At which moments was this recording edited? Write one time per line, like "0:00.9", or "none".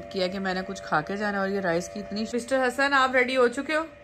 0:02.3